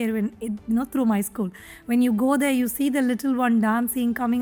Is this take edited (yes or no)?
no